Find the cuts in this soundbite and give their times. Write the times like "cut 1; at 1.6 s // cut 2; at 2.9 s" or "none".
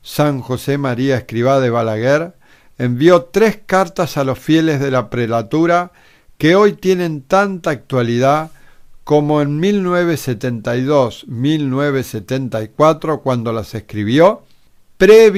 none